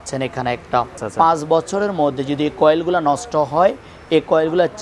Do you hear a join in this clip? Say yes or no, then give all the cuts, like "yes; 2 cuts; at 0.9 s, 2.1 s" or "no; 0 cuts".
yes; 1 cut; at 1.0 s